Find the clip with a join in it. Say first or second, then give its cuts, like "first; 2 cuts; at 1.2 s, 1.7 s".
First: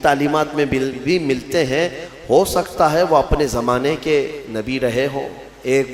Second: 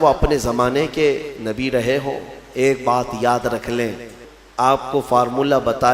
second; 1 cut; at 4.2 s